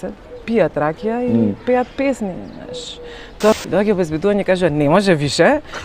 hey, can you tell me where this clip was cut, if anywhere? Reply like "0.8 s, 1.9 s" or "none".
3.5 s